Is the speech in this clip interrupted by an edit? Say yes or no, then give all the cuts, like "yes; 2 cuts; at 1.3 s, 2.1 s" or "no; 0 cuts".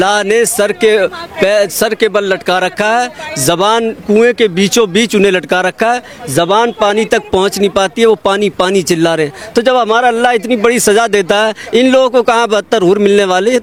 no; 0 cuts